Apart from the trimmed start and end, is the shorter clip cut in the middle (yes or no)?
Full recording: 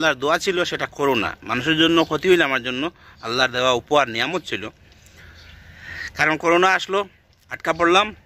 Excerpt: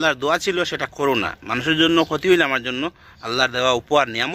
no